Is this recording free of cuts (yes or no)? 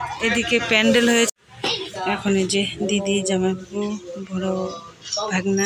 no